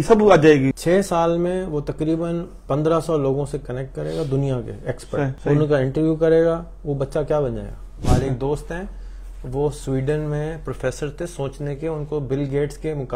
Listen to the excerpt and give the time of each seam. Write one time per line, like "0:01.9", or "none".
0:00.8
0:05.4
0:08.1